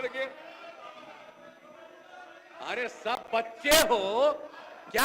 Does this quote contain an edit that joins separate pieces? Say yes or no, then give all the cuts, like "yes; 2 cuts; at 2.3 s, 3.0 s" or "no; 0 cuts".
no; 0 cuts